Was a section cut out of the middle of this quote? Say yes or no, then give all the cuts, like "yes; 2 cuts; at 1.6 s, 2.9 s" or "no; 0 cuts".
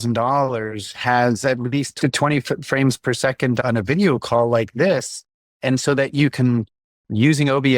yes; 2 cuts; at 1.9 s, 3.6 s